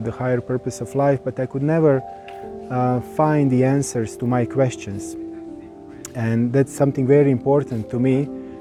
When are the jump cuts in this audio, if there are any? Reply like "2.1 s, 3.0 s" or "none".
none